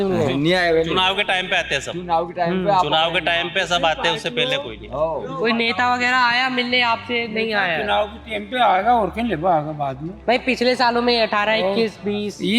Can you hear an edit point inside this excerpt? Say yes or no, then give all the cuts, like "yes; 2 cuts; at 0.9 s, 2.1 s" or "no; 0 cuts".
yes; 1 cut; at 5.3 s